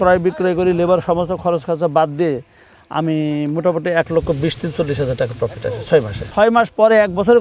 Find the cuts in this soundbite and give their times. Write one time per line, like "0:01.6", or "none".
0:06.3